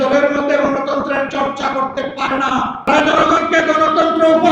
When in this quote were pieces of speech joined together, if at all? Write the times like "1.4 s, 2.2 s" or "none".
2.9 s